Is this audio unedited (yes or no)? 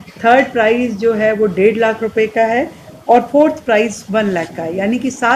yes